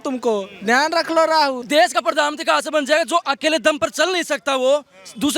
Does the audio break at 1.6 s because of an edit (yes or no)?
yes